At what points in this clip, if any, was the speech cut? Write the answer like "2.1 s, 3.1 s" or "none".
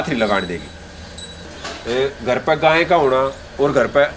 1.6 s